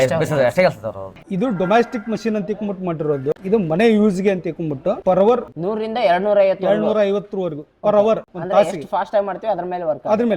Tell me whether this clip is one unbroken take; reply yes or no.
no